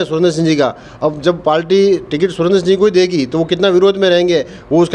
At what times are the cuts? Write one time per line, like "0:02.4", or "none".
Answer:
none